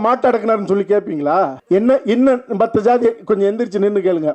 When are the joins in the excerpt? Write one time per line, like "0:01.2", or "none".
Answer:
0:01.6